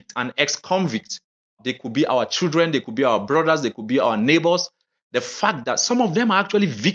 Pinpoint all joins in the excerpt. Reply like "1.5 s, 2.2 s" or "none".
1.6 s